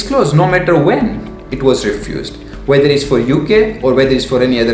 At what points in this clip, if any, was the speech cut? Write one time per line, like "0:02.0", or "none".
none